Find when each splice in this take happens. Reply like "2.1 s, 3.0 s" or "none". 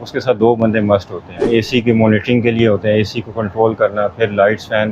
1.4 s